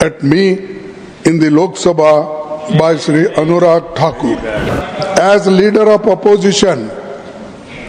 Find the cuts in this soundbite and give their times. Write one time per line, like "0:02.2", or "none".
0:04.6